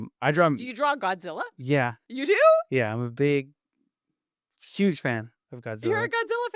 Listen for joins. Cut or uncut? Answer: uncut